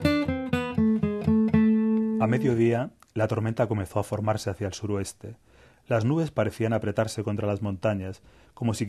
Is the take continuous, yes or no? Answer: no